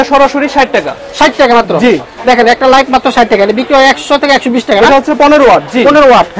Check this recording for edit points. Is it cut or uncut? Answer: uncut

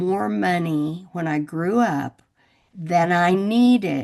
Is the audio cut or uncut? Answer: uncut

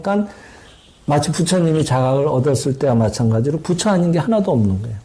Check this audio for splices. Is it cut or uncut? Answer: uncut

